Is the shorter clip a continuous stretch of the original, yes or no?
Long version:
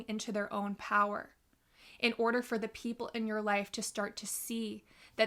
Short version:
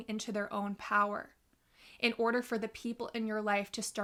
yes